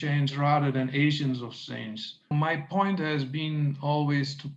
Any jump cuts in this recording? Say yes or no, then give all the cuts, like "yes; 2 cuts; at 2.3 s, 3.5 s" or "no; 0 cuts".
yes; 1 cut; at 2.3 s